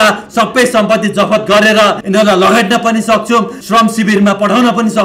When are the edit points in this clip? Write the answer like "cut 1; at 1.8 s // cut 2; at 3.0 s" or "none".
cut 1; at 2.0 s // cut 2; at 3.6 s